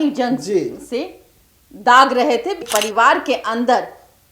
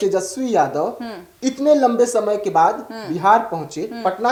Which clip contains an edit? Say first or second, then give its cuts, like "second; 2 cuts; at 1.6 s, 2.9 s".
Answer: first; 1 cut; at 2.6 s